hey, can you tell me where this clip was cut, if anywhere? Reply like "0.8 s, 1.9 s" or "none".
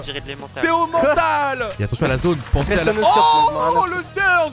1.7 s